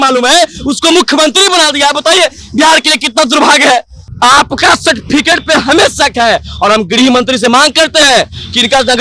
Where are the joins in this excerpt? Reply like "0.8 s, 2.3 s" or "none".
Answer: 4.0 s

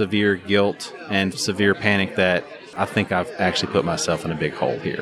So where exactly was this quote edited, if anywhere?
1.4 s, 2.6 s

